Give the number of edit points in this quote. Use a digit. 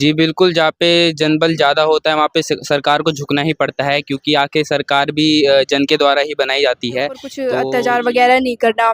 1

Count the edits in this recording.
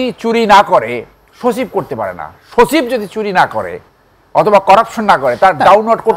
0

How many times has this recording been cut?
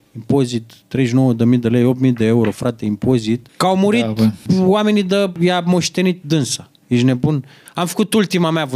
5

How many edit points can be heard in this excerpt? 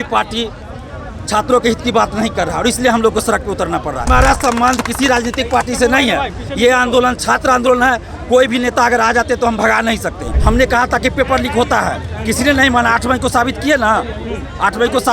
2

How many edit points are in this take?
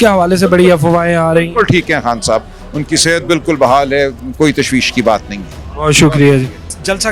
0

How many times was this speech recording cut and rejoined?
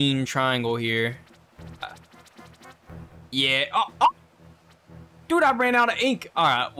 1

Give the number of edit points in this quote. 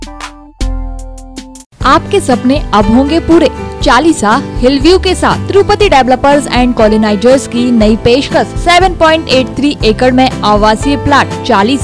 0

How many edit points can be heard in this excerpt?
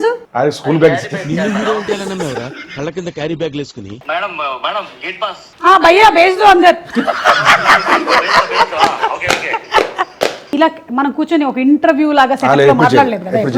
2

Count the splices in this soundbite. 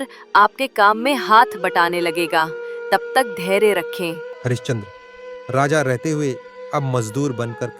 1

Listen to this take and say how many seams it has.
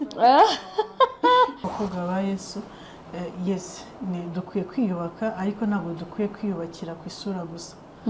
1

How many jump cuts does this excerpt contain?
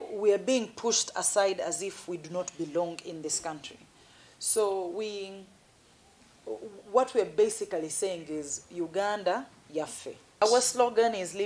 1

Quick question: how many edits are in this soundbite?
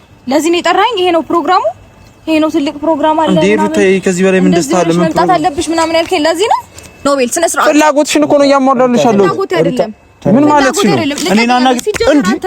1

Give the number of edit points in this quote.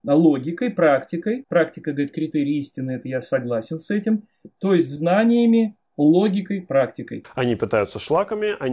2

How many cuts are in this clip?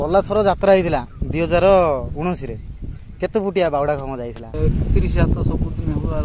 1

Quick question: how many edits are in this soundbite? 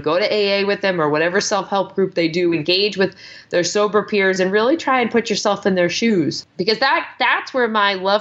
1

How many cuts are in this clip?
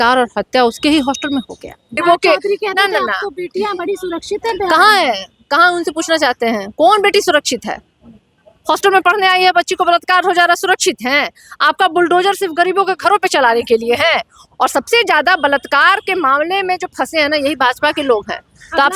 2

